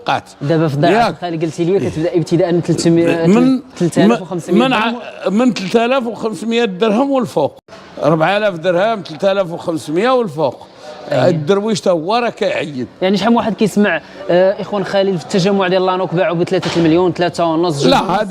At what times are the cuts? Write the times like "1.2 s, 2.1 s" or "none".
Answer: 7.6 s